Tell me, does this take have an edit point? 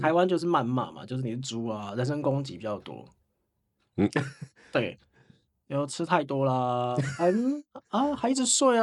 no; 0 cuts

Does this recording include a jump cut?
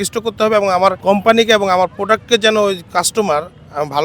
yes; 1 cut; at 1.0 s

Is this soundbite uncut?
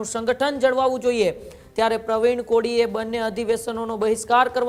yes; 0 cuts

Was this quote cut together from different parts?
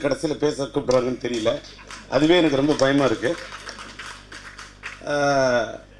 no; 0 cuts

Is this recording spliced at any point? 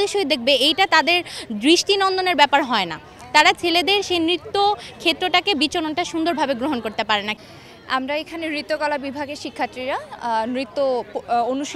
no; 0 cuts

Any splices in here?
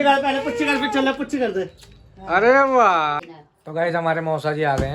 yes; 1 cut; at 3.3 s

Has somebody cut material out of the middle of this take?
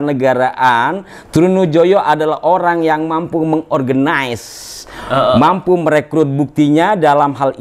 no; 0 cuts

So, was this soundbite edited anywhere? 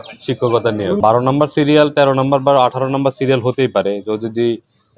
yes; 1 cut; at 1.0 s

